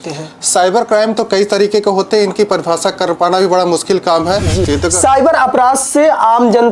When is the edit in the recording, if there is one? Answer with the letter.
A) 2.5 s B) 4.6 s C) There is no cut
B